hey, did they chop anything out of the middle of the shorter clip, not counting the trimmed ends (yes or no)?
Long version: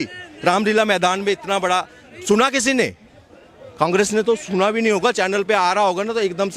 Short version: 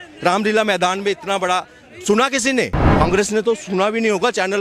yes